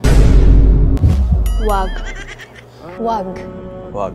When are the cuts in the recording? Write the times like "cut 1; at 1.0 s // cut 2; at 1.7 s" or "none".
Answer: none